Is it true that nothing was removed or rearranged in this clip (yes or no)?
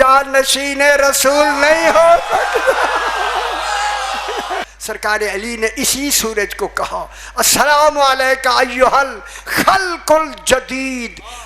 no